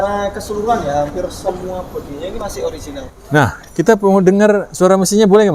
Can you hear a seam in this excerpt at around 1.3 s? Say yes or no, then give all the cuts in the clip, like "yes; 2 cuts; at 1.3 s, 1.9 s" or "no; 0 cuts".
no; 1 cut; at 3.1 s